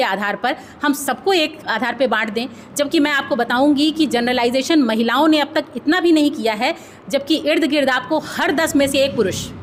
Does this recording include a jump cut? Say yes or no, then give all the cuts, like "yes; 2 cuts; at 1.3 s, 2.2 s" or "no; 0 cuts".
no; 0 cuts